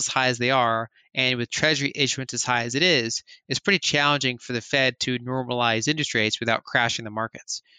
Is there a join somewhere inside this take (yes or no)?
no